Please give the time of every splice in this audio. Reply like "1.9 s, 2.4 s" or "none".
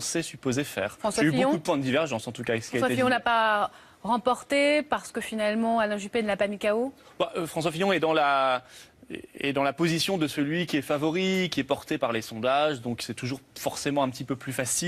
11.7 s